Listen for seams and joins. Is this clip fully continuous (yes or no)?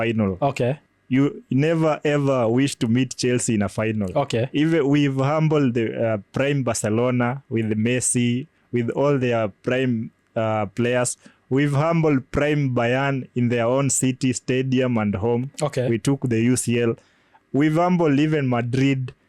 yes